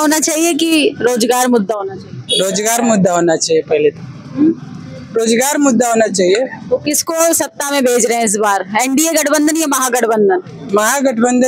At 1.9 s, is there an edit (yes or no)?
no